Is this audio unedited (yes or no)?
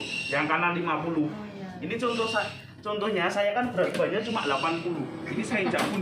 yes